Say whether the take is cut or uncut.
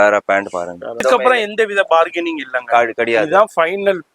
cut